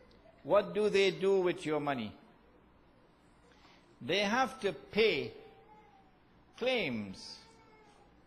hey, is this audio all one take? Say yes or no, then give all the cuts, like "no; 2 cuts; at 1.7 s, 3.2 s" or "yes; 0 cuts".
no; 1 cut; at 1.8 s